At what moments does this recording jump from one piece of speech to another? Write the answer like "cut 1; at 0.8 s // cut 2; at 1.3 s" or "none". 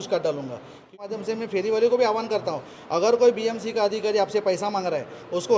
cut 1; at 0.9 s